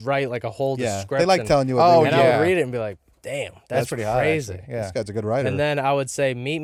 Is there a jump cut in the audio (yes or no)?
no